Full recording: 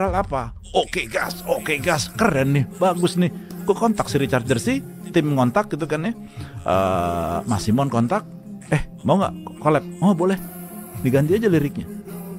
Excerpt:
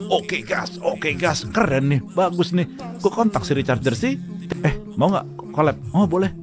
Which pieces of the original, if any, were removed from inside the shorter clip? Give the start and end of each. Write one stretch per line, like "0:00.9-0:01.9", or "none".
0:05.0-0:08.4

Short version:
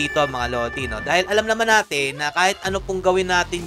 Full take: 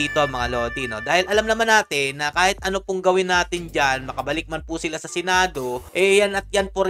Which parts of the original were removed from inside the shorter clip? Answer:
none

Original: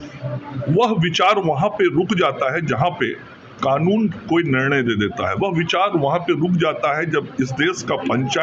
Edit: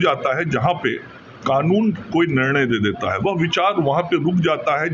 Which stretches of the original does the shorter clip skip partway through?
none

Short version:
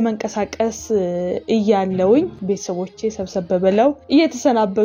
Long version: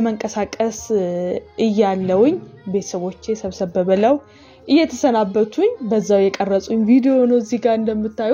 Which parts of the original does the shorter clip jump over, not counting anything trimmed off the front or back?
0:01.4-0:01.5
0:02.5-0:02.6
0:04.3-0:04.6

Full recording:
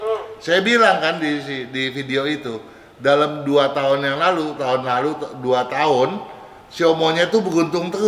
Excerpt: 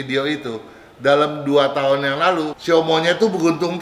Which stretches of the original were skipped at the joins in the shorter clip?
0:04.5-0:06.6

